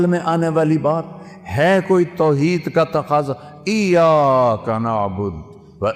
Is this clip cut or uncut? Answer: uncut